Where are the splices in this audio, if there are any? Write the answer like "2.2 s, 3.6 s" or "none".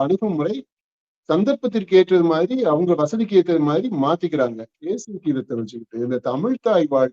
4.7 s